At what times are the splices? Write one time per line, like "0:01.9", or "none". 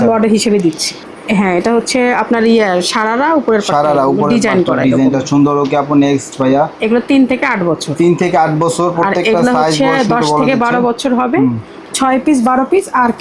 none

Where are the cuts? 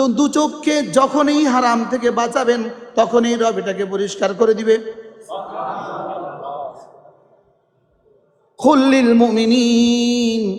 none

